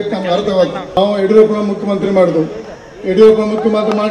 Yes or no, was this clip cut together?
yes